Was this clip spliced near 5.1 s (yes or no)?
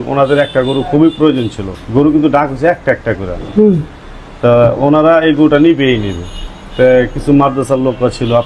no